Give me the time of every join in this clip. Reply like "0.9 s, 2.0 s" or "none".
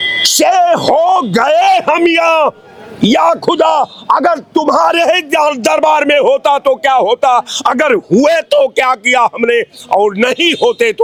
none